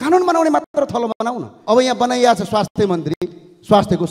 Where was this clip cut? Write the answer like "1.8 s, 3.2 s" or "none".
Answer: 1.5 s